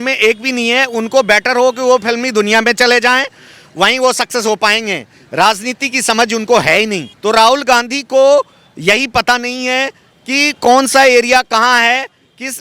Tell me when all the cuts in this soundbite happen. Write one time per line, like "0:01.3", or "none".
0:07.1